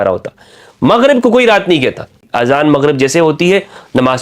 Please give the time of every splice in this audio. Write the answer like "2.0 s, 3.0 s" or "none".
2.2 s